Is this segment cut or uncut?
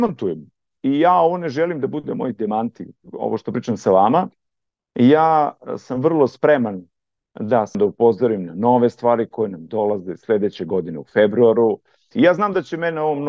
cut